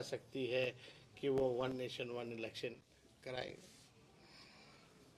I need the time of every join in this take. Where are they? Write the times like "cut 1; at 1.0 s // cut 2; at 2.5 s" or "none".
none